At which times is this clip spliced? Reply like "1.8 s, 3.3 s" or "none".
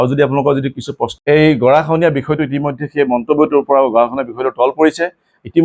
1.1 s